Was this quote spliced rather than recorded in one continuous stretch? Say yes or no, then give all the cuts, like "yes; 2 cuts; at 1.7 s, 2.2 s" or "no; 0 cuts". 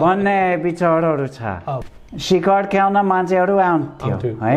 yes; 1 cut; at 1.8 s